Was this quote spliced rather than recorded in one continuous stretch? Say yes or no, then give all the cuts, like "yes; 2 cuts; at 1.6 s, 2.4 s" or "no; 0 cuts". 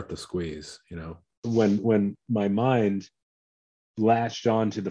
yes; 1 cut; at 1.4 s